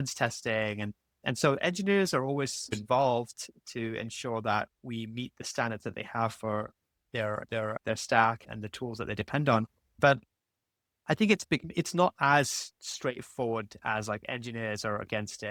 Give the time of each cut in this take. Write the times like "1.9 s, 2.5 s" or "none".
none

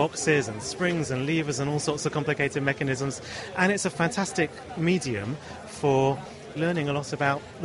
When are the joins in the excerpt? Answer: 6.6 s

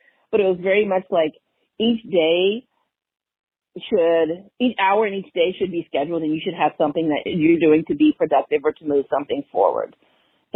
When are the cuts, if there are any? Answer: none

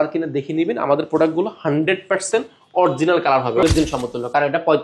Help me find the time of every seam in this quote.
3.6 s

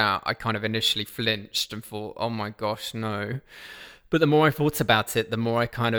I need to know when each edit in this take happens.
none

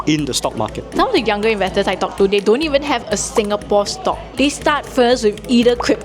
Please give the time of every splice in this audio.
0.9 s, 4.3 s

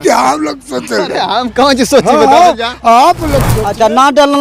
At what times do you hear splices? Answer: 3.4 s

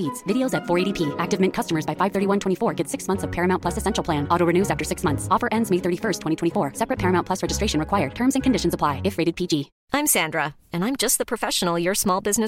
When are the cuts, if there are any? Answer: 9.8 s

